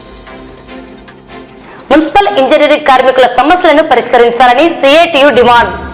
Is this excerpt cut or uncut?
cut